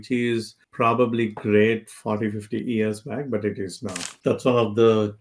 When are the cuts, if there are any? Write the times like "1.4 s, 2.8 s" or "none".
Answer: 4.1 s